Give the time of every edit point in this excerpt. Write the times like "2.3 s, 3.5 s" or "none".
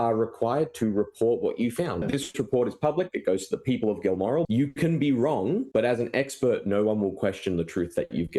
2.0 s, 4.5 s, 5.7 s